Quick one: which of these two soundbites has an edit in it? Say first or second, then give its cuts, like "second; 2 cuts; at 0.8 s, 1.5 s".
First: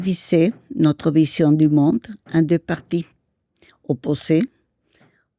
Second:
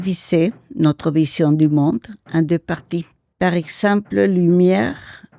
second; 1 cut; at 3.2 s